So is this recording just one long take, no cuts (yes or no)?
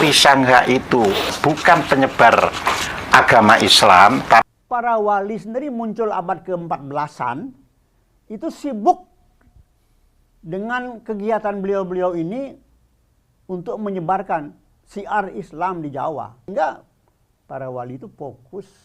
no